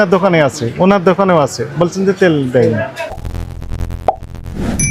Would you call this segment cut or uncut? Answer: cut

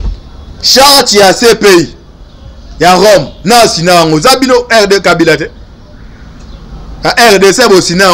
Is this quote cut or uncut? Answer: uncut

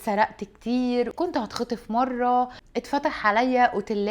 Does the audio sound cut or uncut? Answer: cut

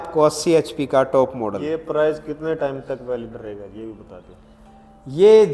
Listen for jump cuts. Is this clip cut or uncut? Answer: cut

